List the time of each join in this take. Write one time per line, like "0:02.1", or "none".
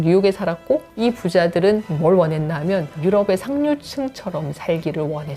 0:00.9
0:01.9
0:02.9